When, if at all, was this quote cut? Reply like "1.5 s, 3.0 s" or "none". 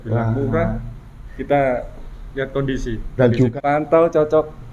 3.5 s